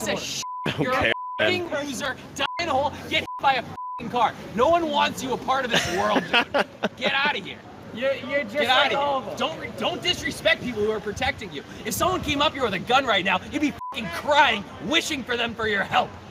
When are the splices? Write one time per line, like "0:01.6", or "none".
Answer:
none